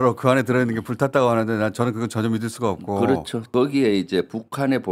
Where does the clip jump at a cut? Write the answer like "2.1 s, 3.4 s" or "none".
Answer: 3.5 s